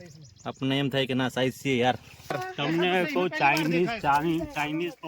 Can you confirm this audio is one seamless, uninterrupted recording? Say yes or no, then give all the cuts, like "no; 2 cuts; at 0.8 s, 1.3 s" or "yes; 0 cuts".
no; 1 cut; at 2.4 s